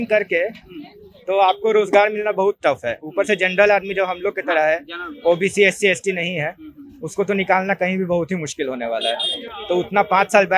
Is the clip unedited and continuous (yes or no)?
yes